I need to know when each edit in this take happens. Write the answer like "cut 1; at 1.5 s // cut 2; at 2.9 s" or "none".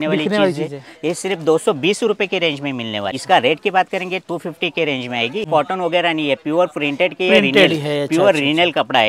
cut 1; at 3.2 s // cut 2; at 5.5 s